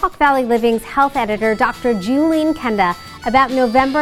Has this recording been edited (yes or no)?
no